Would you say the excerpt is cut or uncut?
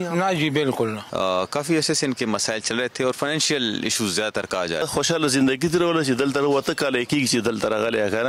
cut